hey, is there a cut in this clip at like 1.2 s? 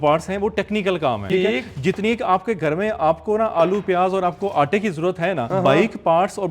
yes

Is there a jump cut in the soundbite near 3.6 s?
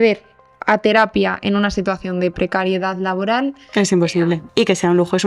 yes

